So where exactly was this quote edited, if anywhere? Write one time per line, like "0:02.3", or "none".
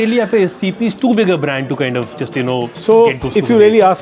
none

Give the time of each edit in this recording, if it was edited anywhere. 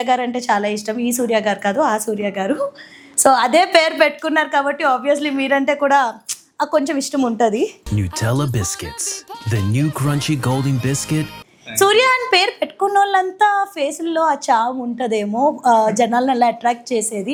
none

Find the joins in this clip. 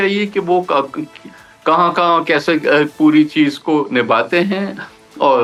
none

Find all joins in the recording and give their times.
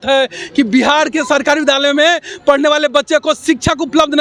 none

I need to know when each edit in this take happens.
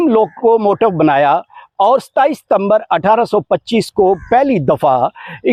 none

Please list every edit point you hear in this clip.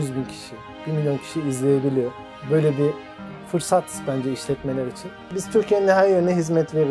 0:05.2

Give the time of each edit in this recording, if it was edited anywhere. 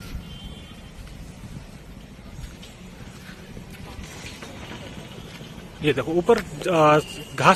none

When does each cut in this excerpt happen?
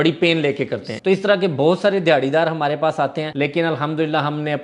0:00.9
0:03.2

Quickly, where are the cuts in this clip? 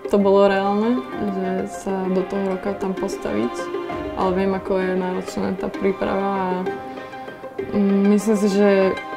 none

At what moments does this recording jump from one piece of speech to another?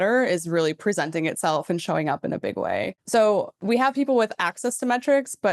0:03.0
0:03.5

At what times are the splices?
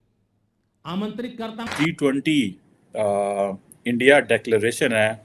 0:01.7

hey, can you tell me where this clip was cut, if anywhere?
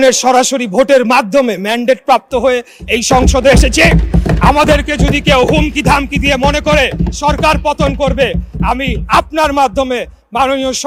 none

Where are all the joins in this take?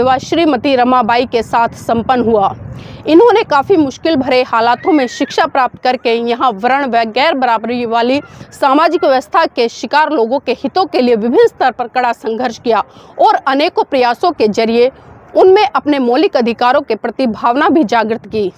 none

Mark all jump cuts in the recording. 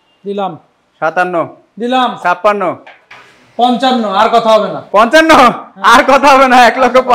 none

